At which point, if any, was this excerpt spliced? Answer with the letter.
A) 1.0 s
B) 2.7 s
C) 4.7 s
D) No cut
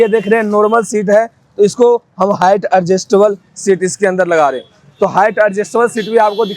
D